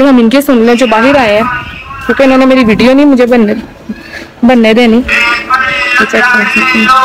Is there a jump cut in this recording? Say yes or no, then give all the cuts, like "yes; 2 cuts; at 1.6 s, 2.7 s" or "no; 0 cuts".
no; 0 cuts